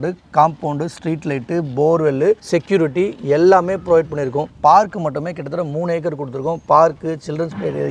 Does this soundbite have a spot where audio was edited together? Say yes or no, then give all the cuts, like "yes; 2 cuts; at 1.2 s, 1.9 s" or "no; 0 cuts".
no; 0 cuts